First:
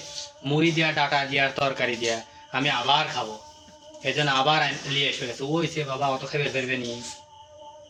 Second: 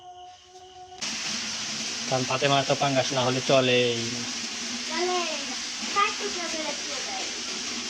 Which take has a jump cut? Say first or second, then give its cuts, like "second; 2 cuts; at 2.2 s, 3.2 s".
second; 1 cut; at 1.0 s